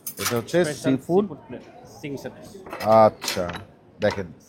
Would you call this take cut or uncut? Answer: uncut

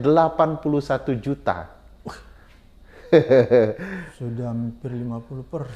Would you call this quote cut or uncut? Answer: uncut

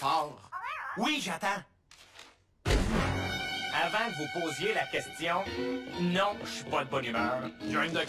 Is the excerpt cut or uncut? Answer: cut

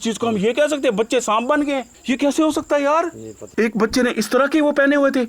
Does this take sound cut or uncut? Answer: cut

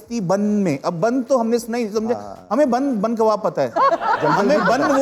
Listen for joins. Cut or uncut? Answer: cut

